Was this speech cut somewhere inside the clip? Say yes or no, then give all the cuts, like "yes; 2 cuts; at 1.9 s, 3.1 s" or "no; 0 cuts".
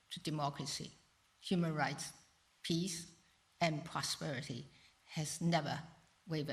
no; 0 cuts